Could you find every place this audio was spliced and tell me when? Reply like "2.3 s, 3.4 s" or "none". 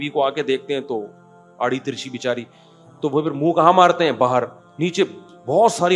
4.6 s

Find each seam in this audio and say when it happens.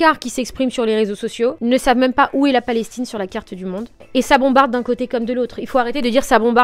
1.6 s, 4.0 s

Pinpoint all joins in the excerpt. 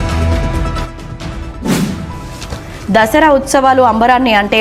1.7 s

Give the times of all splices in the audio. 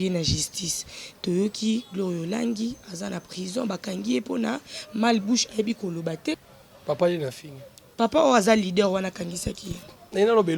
6.5 s

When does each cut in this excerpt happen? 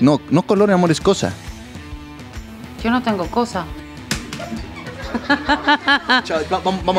none

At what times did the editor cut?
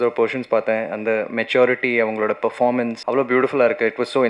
3.0 s

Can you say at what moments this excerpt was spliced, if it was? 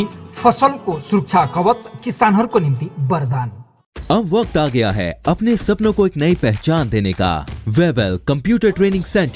7.5 s

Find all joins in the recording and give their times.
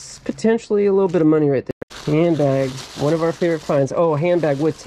1.8 s

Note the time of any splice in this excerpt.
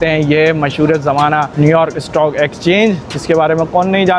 1.5 s

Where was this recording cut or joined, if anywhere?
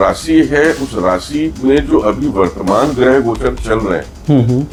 none

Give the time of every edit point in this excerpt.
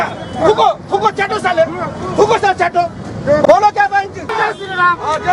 4.3 s

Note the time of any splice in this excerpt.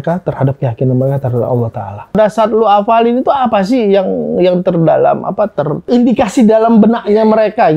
2.2 s

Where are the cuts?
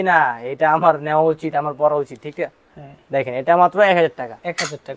none

